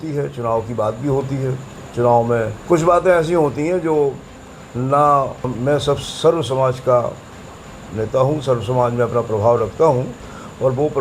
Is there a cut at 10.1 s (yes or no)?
no